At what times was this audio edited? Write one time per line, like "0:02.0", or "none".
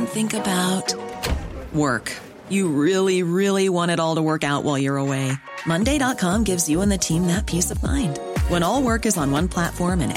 none